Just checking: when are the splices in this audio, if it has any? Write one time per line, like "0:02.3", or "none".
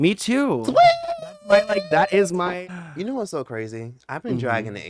0:02.5